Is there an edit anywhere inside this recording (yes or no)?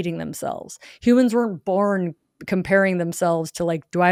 no